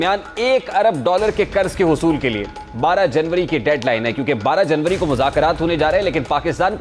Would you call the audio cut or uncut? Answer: uncut